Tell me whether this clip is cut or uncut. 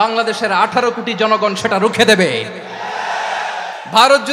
uncut